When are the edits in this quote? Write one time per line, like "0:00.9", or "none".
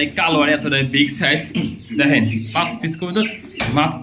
0:02.5